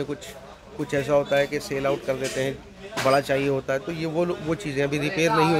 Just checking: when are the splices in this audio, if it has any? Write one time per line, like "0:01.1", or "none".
none